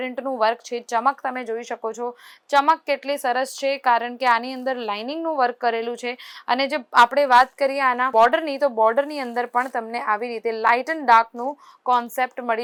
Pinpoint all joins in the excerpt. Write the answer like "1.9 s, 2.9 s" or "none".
none